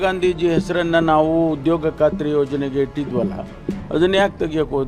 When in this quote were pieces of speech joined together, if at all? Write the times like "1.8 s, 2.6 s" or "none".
none